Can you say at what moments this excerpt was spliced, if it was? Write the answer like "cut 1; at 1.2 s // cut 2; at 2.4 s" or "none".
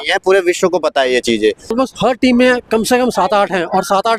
cut 1; at 1.7 s